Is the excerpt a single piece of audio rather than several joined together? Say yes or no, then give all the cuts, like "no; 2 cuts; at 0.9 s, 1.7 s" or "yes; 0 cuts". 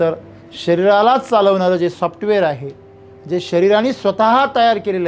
yes; 0 cuts